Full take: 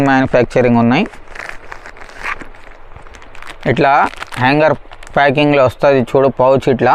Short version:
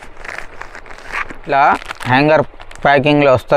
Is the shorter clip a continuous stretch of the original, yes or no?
no